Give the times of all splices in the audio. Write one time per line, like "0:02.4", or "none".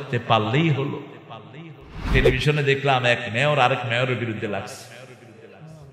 0:02.1